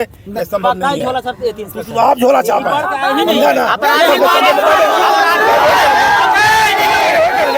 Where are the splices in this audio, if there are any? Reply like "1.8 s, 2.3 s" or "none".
none